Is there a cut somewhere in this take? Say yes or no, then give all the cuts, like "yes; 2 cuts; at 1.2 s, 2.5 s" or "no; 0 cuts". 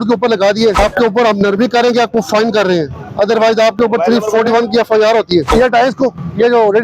yes; 2 cuts; at 0.8 s, 5.5 s